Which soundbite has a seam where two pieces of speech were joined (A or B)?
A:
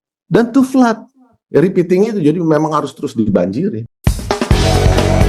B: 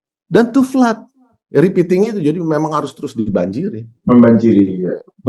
B